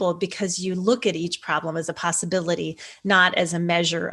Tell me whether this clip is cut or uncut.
uncut